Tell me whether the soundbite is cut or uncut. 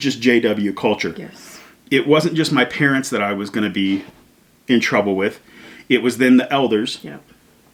uncut